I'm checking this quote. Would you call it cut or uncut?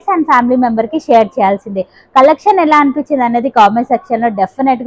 uncut